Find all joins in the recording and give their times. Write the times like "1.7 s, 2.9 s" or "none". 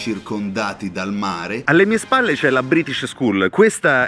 1.6 s